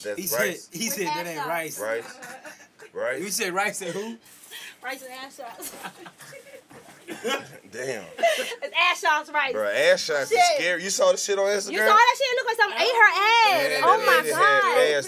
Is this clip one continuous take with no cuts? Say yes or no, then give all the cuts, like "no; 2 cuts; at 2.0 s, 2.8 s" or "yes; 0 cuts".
yes; 0 cuts